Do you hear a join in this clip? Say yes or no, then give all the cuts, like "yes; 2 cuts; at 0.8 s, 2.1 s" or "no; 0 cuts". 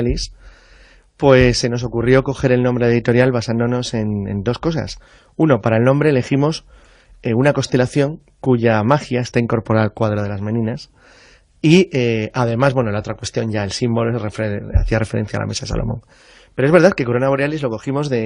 yes; 1 cut; at 4.5 s